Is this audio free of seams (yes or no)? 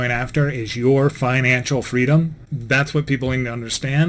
no